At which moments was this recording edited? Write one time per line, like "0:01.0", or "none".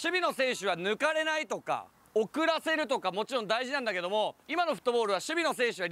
0:04.4